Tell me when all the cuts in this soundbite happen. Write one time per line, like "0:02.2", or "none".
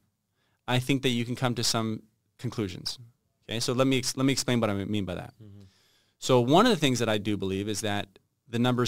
none